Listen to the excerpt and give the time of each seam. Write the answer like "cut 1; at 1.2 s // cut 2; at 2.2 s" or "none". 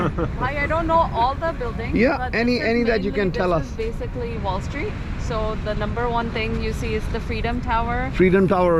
none